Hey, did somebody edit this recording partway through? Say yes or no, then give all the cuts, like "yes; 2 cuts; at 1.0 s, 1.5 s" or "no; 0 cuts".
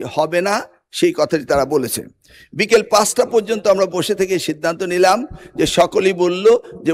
no; 0 cuts